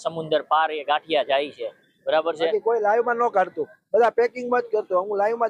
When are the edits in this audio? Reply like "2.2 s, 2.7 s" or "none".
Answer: 2.5 s